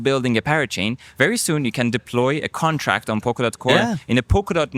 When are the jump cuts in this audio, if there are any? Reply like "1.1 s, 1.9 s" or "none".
3.7 s